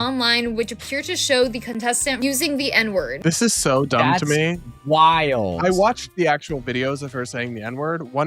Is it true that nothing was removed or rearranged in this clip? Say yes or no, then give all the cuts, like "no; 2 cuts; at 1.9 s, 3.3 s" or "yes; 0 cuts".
no; 2 cuts; at 2.2 s, 3.1 s